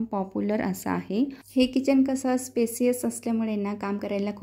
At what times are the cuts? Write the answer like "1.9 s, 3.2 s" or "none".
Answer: 1.4 s